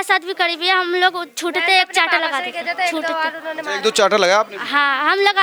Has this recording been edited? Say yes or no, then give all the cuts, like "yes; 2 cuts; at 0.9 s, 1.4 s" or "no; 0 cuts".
no; 0 cuts